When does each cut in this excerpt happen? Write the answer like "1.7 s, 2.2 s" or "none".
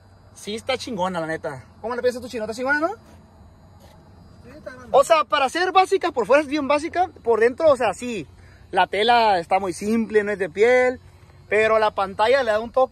none